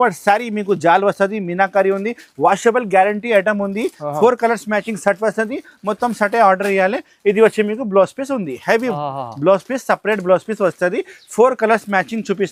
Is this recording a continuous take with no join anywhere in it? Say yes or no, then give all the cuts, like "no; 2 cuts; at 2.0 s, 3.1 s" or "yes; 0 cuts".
yes; 0 cuts